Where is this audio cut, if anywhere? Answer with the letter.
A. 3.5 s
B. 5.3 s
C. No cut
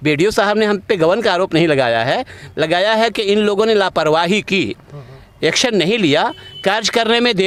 C